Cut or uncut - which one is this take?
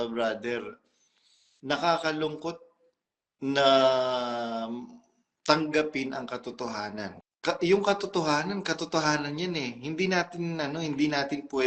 cut